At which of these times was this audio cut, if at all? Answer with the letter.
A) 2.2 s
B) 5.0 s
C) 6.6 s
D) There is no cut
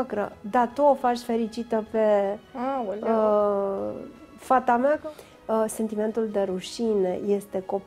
B